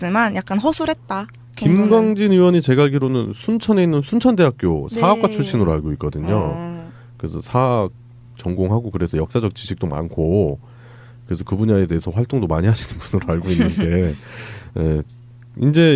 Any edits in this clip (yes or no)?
yes